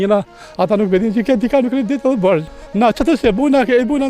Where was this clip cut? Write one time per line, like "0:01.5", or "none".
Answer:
0:02.6